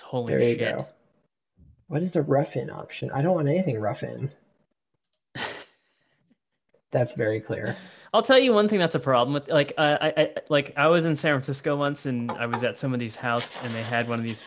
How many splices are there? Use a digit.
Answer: 1